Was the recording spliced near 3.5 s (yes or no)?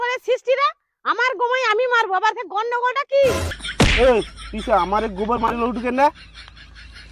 yes